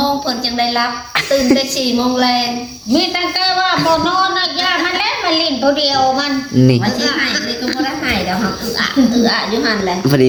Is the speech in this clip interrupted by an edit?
no; 0 cuts

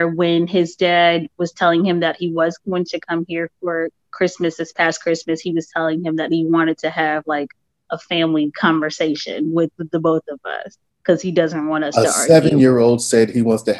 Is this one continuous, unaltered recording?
yes; 0 cuts

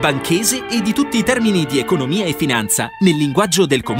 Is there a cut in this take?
no; 0 cuts

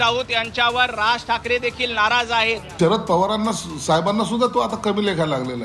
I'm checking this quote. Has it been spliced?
yes; 1 cut; at 2.8 s

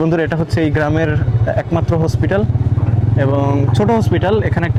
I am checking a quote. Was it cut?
no; 0 cuts

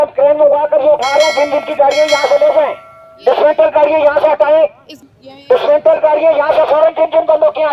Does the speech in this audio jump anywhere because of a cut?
no; 0 cuts

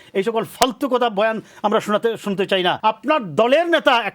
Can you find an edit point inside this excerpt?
yes; 1 cut; at 2.8 s

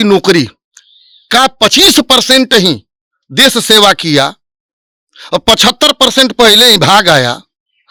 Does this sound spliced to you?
no; 0 cuts

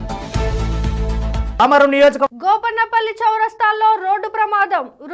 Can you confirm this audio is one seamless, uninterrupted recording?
no; 1 cut; at 1.5 s

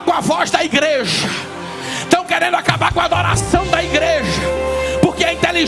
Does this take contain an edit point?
no; 0 cuts

